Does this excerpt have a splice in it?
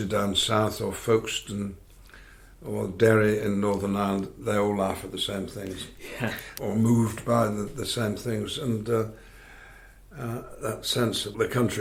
no; 0 cuts

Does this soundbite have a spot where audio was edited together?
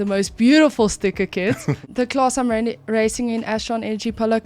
yes; 1 cut; at 1.8 s

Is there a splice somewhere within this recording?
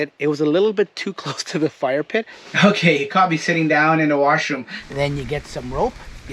yes; 2 cuts; at 2.4 s, 4.8 s

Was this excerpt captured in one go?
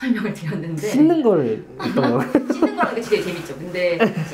yes; 0 cuts

